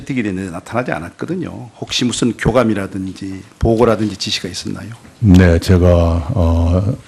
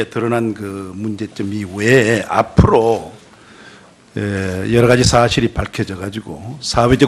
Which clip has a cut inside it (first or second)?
second